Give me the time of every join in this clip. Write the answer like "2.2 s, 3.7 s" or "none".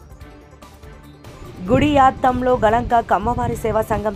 1.2 s